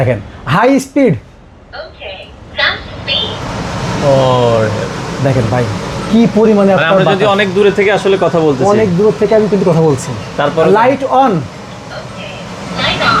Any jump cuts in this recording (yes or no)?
no